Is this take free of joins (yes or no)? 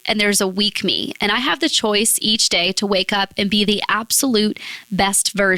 yes